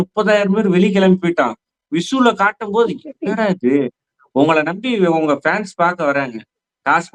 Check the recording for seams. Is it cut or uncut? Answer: uncut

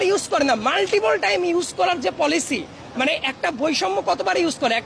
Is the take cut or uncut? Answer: uncut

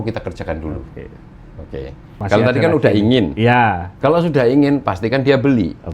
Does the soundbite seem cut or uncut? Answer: cut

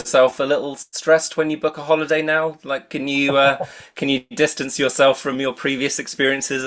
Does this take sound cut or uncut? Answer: uncut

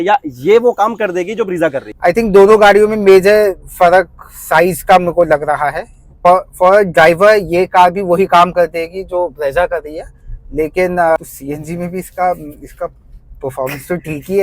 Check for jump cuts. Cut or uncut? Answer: cut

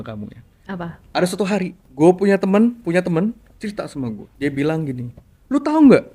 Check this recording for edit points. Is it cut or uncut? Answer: cut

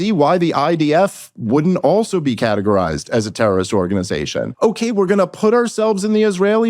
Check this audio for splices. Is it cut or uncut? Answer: cut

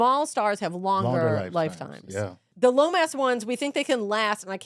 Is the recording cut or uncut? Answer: cut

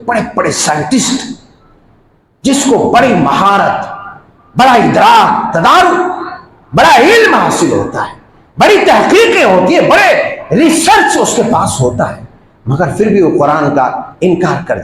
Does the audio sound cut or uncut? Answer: uncut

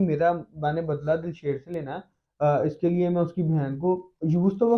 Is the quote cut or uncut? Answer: uncut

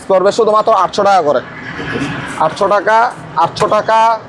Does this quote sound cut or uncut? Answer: uncut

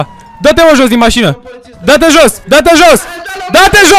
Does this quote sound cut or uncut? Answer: uncut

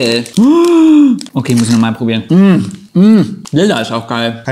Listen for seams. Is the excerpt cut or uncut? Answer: cut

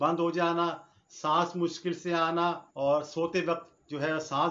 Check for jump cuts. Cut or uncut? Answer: cut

